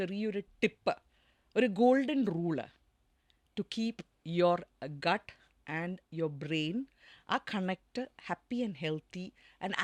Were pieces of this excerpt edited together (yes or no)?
no